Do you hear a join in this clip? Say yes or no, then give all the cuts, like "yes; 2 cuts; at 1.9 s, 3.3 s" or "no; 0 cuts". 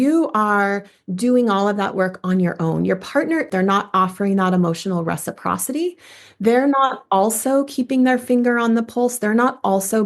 yes; 1 cut; at 3.4 s